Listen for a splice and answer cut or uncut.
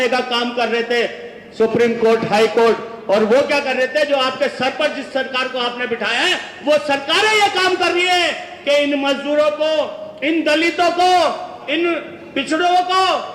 uncut